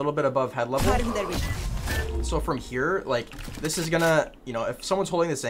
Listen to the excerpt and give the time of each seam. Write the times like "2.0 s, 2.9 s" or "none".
none